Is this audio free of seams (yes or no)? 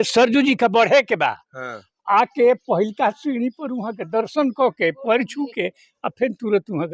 yes